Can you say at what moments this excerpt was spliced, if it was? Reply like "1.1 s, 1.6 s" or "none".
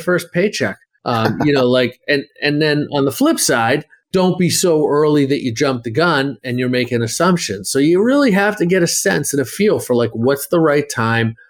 none